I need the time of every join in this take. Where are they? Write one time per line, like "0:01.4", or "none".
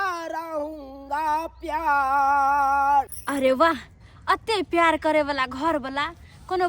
0:03.2